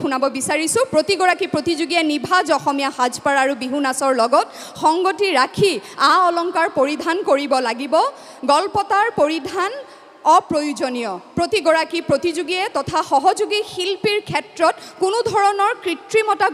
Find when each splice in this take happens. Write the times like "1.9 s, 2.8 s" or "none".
none